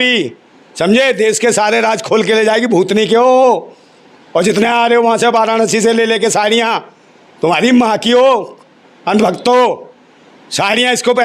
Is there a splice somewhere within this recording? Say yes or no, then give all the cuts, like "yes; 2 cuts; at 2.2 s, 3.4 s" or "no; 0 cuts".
no; 0 cuts